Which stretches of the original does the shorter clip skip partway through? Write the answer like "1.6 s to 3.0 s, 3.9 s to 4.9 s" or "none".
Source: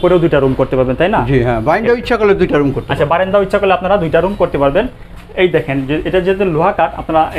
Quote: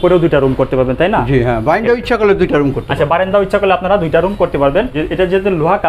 5.0 s to 5.9 s